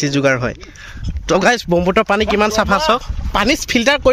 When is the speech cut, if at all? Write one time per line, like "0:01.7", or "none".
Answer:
0:01.2
0:03.2